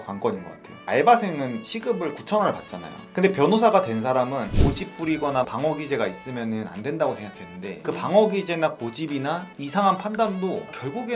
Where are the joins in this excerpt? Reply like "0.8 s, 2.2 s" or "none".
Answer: 4.5 s